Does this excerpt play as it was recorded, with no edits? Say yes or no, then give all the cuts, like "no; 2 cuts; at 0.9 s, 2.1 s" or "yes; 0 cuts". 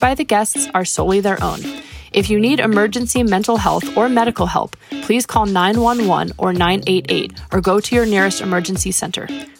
yes; 0 cuts